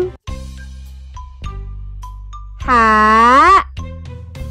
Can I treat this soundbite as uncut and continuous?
no; 3 cuts; at 0.7 s, 2.7 s, 3.7 s

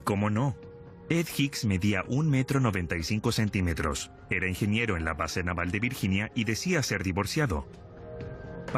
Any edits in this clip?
yes; 1 cut; at 1.0 s

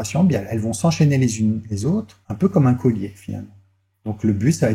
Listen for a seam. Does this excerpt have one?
no; 0 cuts

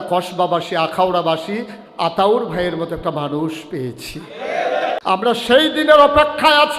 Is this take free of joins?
no; 1 cut; at 5.0 s

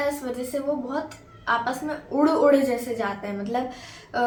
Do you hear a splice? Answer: no; 0 cuts

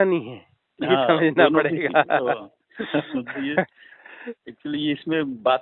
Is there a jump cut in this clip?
no; 0 cuts

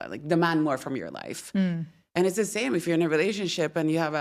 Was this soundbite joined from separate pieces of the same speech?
no; 0 cuts

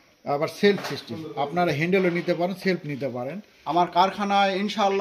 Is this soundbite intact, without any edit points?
no; 1 cut; at 3.7 s

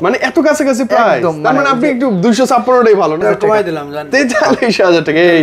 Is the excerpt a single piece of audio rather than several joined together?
no; 1 cut; at 3.2 s

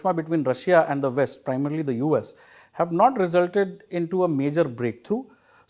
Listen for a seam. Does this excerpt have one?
no; 0 cuts

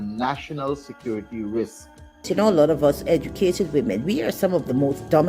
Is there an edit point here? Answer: yes; 1 cut; at 2.3 s

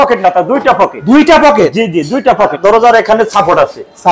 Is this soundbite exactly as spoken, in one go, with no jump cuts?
no; 1 cut; at 2.6 s

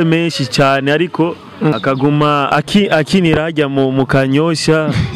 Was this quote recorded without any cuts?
no; 2 cuts; at 1.7 s, 2.5 s

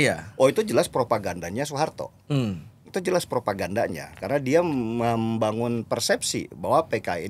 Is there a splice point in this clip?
no; 0 cuts

